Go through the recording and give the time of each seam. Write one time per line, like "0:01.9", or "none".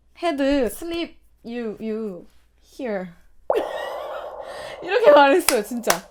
none